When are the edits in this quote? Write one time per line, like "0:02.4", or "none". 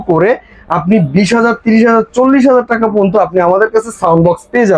none